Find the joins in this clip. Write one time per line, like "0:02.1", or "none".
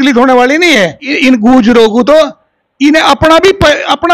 0:01.1